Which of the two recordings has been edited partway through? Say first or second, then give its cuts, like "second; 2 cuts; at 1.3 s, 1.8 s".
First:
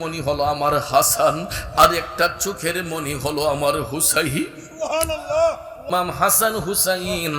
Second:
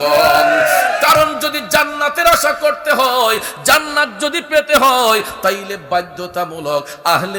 first; 1 cut; at 5.9 s